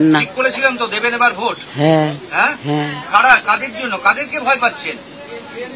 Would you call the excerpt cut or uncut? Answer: uncut